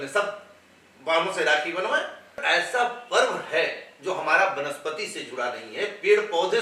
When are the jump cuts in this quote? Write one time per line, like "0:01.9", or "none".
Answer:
0:02.4